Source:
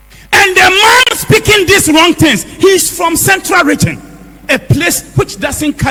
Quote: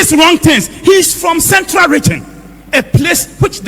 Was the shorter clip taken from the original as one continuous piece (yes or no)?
yes